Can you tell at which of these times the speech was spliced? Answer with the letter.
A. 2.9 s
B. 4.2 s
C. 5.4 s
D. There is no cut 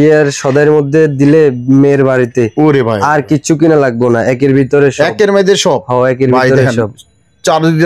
D